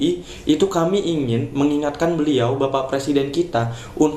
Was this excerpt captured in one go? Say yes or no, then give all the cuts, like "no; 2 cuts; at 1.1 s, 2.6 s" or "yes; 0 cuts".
yes; 0 cuts